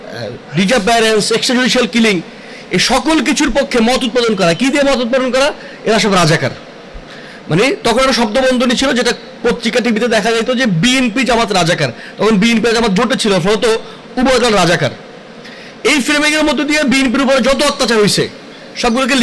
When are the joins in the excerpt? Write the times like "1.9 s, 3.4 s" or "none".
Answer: none